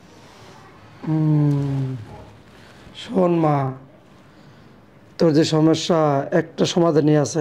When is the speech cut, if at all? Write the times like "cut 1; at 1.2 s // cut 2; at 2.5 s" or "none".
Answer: none